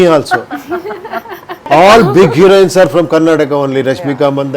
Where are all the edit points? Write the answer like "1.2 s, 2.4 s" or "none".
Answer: 1.7 s